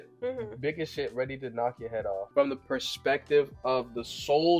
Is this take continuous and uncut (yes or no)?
no